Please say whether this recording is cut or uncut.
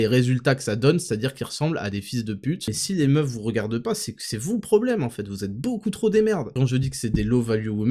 cut